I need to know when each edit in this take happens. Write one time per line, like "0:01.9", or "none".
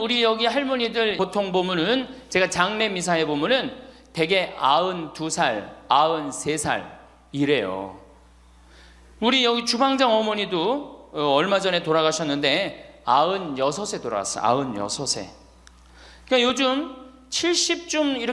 0:01.2

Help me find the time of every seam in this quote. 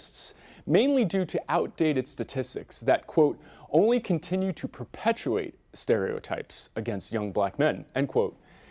0:06.9

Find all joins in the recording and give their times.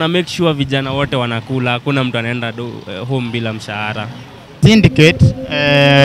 0:04.6

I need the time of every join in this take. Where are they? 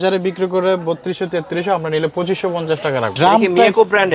0:03.1

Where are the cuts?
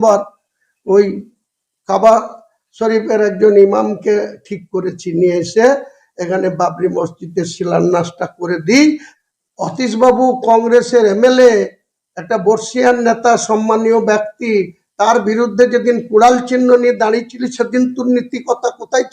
0:09.1

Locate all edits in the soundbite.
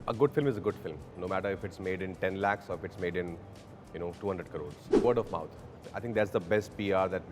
0:05.0

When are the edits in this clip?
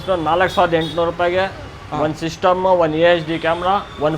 none

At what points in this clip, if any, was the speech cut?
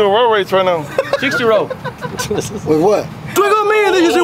0:03.3

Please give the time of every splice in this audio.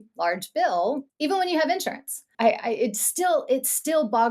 0:01.1
0:02.2

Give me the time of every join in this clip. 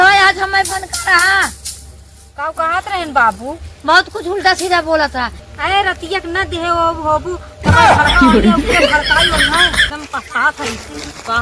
0:09.8

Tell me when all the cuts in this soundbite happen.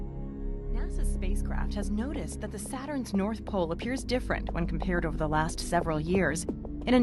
0:04.7

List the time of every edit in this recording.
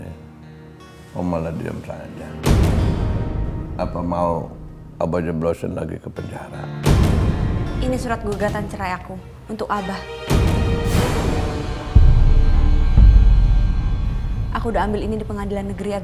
0:07.8

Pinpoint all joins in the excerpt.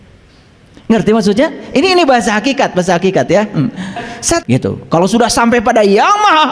0:04.4

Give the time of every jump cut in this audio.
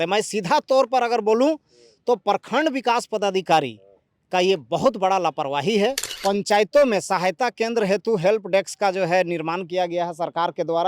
0:06.1

